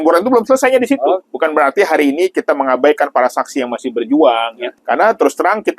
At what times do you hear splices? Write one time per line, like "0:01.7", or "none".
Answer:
0:01.3
0:04.7

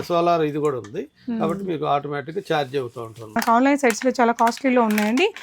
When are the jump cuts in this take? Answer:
0:03.4

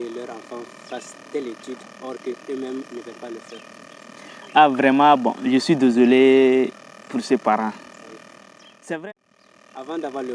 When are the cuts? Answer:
0:09.1

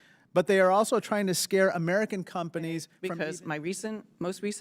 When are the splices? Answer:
0:02.9

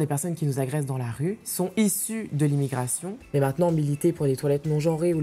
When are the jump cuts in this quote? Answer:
0:01.5
0:03.1

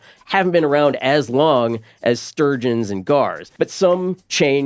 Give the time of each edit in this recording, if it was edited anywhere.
0:03.4

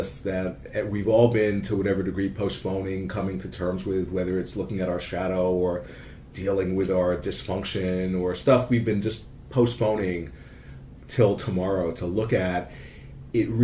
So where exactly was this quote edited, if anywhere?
0:11.0

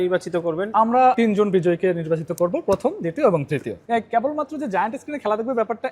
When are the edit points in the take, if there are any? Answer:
0:01.2
0:03.8

